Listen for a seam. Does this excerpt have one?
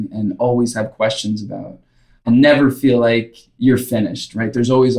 yes; 2 cuts; at 2.2 s, 3.4 s

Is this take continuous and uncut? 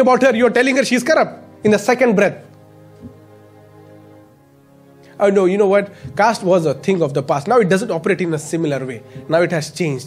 yes; 0 cuts

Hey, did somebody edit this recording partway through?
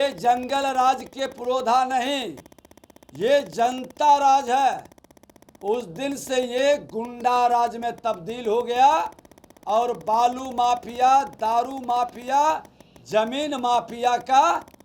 no; 0 cuts

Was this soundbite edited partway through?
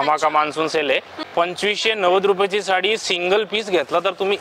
yes; 1 cut; at 1.3 s

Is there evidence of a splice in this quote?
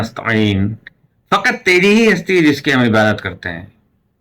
no; 0 cuts

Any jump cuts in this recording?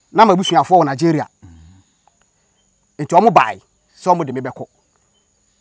no; 0 cuts

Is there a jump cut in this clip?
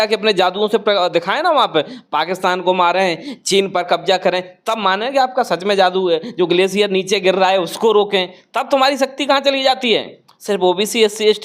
no; 0 cuts

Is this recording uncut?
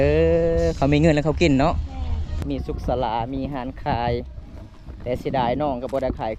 no; 1 cut; at 2.4 s

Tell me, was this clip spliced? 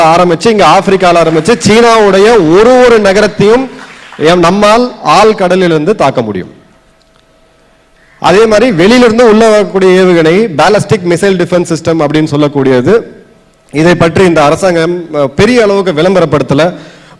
no; 0 cuts

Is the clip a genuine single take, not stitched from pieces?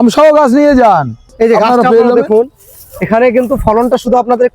no; 1 cut; at 1.3 s

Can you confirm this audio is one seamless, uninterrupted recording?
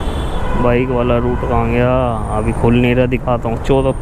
yes; 0 cuts

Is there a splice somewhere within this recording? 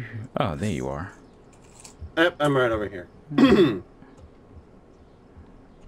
no; 0 cuts

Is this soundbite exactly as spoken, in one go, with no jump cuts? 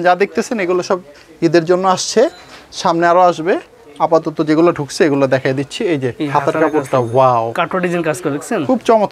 yes; 0 cuts

